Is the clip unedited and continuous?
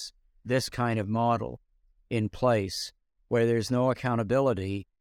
yes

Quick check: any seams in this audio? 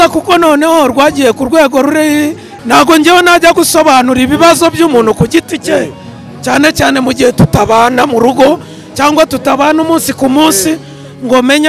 yes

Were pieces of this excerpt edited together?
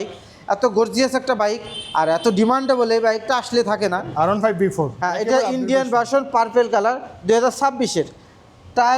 yes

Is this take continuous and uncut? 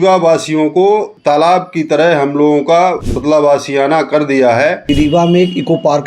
no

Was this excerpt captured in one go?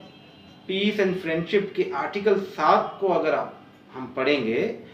yes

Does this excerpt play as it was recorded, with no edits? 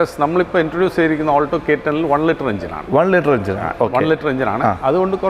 yes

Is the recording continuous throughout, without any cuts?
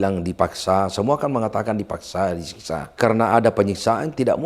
no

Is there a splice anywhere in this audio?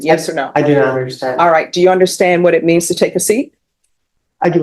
no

